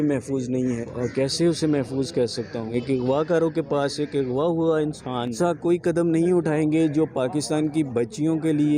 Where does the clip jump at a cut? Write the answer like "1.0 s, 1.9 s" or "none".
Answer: 0.8 s, 2.7 s, 5.3 s